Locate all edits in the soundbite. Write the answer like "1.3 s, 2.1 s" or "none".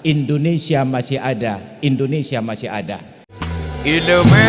3.3 s